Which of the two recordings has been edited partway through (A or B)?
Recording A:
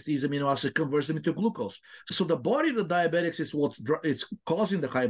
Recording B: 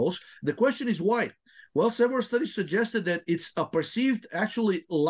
A